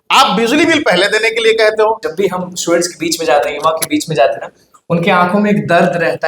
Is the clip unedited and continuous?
no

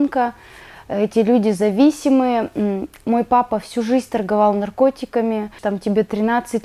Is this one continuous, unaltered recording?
no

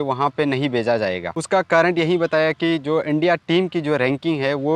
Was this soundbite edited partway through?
no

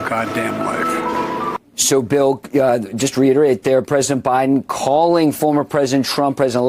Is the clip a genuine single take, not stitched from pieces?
no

